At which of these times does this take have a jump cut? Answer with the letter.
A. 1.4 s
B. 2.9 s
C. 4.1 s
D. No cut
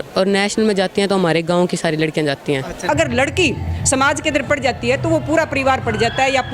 B